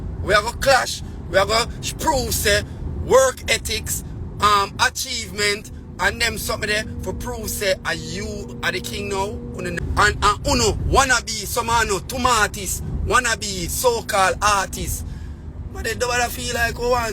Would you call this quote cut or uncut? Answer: cut